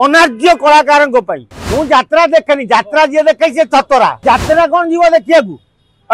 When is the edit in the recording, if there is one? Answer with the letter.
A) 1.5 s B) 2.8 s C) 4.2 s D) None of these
C